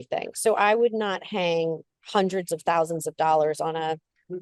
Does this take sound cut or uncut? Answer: uncut